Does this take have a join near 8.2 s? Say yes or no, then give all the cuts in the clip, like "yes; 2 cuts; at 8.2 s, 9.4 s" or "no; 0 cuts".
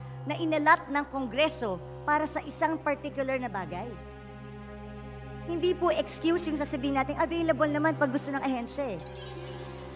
no; 2 cuts; at 3.9 s, 5.5 s